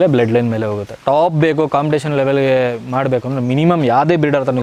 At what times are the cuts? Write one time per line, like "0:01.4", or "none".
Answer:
none